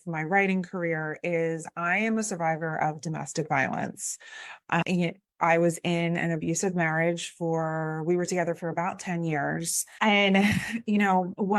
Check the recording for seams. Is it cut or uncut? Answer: uncut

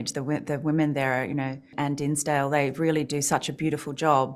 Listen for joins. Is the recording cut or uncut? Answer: cut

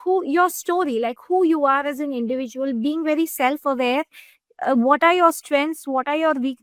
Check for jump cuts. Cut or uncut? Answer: uncut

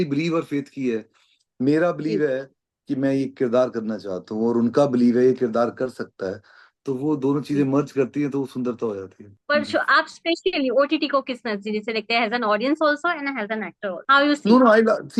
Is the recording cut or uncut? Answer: uncut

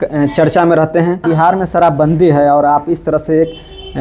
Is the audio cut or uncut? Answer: cut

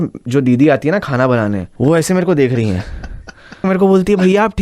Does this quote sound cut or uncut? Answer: cut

